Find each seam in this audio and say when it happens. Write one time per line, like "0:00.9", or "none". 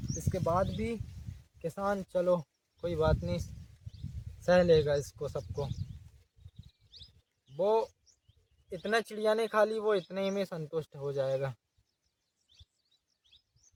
none